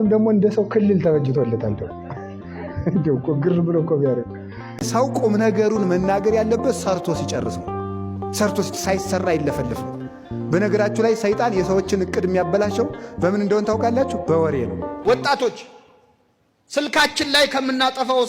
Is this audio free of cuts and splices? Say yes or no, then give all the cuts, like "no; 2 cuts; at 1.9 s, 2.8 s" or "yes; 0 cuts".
no; 2 cuts; at 4.7 s, 14.9 s